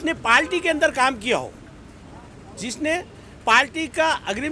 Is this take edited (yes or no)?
no